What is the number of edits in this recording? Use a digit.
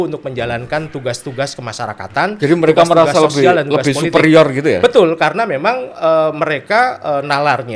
0